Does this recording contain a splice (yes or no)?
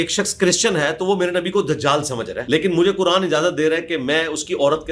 yes